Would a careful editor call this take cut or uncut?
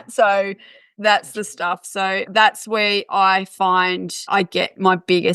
cut